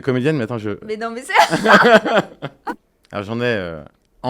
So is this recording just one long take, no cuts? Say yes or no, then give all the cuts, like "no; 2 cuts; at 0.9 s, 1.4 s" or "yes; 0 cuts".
no; 1 cut; at 2.7 s